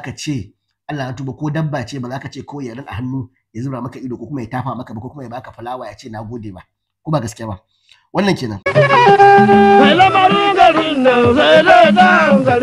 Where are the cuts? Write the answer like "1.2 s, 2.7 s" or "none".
8.6 s